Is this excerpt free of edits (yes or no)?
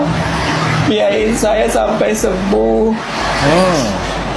yes